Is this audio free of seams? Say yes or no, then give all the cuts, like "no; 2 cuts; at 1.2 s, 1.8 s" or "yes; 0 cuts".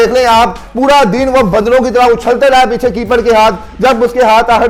yes; 0 cuts